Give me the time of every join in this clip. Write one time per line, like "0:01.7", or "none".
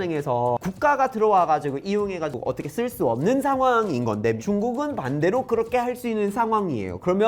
0:04.4

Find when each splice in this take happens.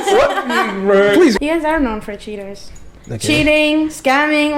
0:01.4

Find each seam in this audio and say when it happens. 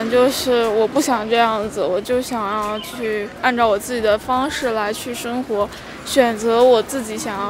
none

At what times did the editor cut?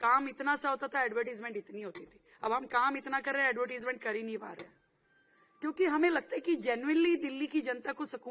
none

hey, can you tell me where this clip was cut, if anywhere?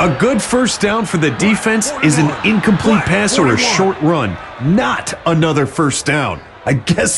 none

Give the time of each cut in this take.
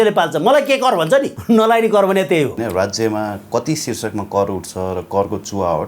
0:01.3
0:02.5

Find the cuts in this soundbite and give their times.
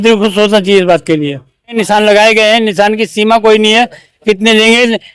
0:01.6

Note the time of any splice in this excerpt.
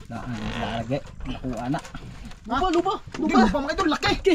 0:02.7

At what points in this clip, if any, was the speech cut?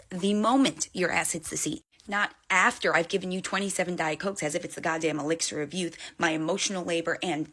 none

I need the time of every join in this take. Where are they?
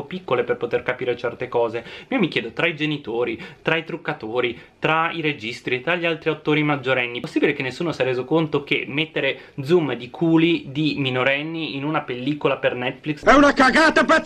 0:13.2

